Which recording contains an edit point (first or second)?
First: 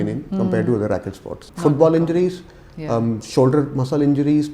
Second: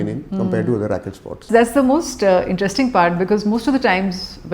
first